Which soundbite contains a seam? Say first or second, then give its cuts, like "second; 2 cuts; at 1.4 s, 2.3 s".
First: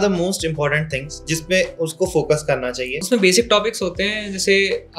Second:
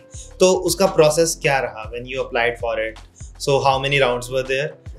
first; 1 cut; at 3.0 s